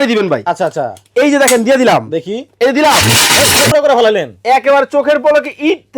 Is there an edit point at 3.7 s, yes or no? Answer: yes